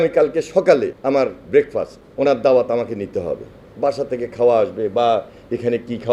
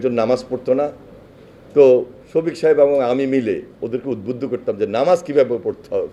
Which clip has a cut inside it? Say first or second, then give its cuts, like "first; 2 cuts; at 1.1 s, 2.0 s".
first; 2 cuts; at 1.0 s, 2.0 s